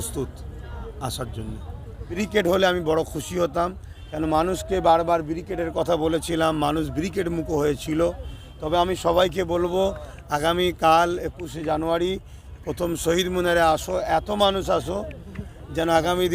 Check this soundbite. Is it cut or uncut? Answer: cut